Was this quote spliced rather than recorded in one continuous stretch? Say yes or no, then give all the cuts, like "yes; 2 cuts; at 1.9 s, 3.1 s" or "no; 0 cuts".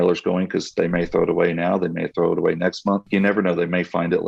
yes; 1 cut; at 3.0 s